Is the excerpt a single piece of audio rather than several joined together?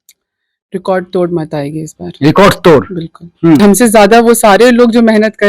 no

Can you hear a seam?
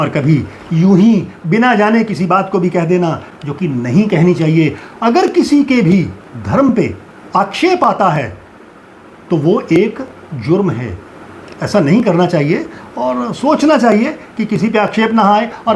no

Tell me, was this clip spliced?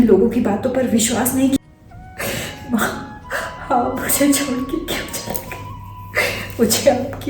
yes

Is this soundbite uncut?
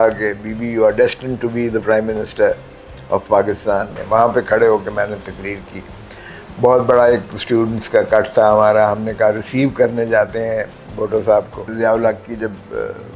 no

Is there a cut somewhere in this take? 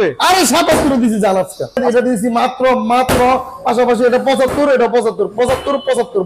yes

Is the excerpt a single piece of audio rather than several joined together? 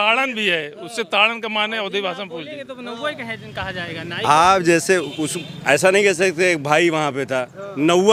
yes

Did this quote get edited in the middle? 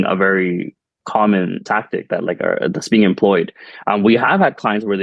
yes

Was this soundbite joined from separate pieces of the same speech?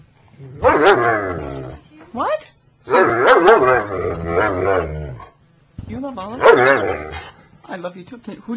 yes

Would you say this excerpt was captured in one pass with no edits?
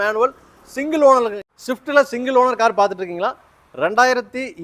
no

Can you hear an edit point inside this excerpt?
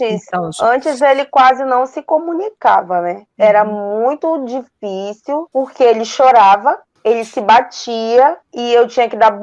yes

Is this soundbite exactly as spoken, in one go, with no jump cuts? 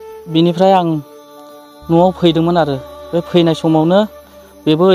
yes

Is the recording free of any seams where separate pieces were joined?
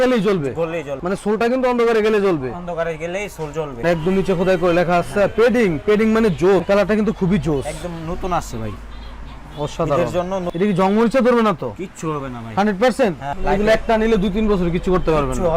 no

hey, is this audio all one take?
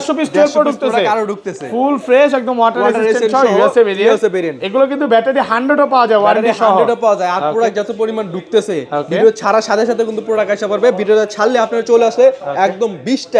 yes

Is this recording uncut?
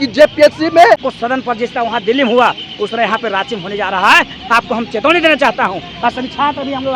no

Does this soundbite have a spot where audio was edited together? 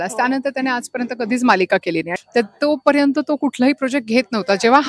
yes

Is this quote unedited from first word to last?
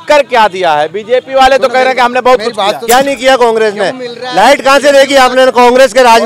no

